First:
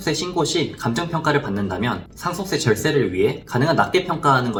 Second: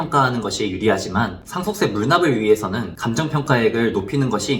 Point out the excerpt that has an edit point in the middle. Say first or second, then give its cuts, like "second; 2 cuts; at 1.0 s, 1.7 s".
second; 2 cuts; at 1.4 s, 2.9 s